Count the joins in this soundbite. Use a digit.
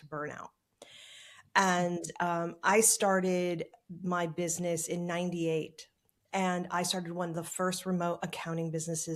0